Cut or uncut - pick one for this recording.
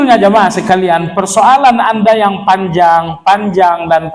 uncut